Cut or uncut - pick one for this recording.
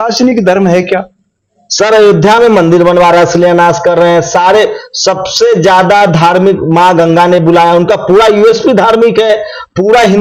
uncut